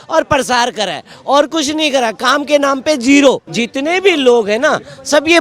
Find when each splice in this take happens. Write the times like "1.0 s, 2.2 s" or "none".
3.5 s